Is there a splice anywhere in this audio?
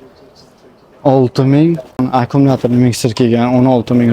yes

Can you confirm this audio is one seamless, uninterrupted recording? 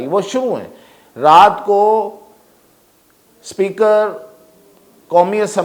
yes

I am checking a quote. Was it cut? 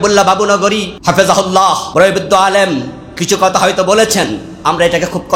yes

